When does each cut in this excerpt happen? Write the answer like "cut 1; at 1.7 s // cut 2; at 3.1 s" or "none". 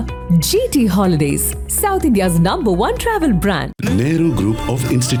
none